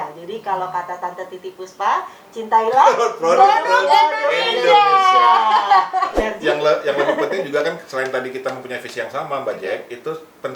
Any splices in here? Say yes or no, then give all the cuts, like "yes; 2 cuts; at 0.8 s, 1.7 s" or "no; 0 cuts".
yes; 1 cut; at 6.1 s